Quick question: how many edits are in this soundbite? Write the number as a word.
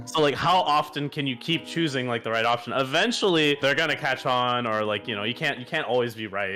one